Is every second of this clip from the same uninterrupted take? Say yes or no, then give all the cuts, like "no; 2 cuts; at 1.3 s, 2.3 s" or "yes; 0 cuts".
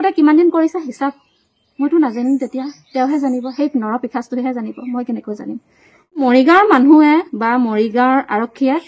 no; 1 cut; at 6.2 s